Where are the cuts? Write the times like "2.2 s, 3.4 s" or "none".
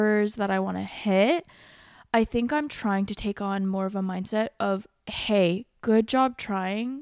none